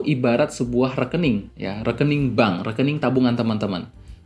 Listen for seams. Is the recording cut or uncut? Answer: cut